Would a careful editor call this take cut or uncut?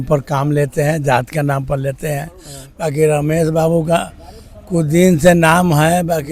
uncut